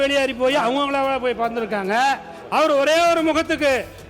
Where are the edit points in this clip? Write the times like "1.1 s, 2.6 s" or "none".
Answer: 2.3 s